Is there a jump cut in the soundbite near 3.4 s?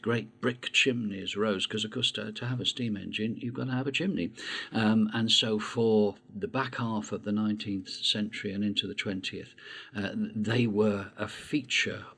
yes; 2 cuts; at 3.4 s, 6.3 s

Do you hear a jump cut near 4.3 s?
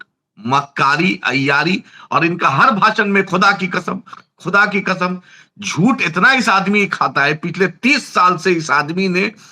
no; 0 cuts

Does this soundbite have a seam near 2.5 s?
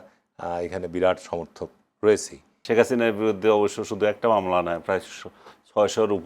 yes; 1 cut; at 2.5 s

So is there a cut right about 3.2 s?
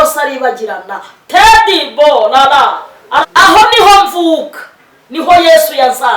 yes; 1 cut; at 3.2 s

